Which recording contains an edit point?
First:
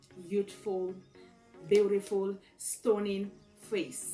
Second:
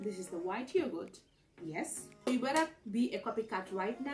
second; 1 cut; at 2.3 s

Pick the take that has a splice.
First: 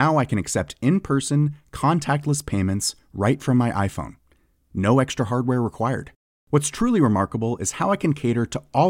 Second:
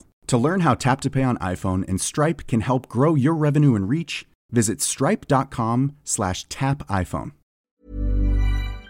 second; 1 cut; at 7.6 s

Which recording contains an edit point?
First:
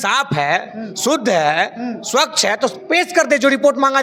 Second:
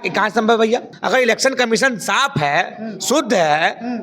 second; 1 cut; at 0.9 s

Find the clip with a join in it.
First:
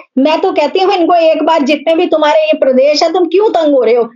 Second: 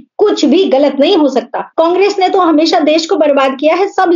second; 1 cut; at 1.6 s

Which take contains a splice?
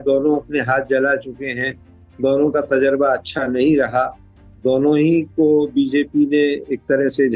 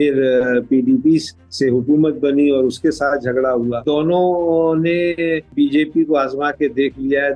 second; 2 cuts; at 3.8 s, 5.5 s

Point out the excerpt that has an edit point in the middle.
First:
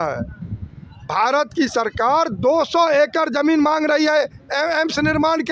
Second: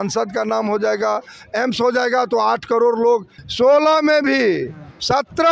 second; 1 cut; at 3.4 s

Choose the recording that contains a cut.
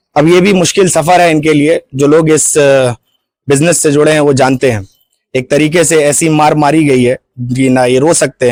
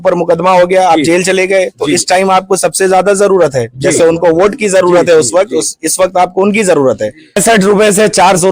second; 1 cut; at 7.4 s

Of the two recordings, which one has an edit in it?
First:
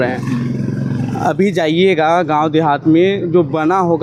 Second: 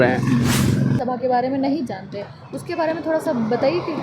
second; 1 cut; at 1.0 s

